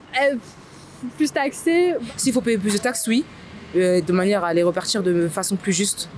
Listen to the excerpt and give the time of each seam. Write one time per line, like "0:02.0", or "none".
0:02.1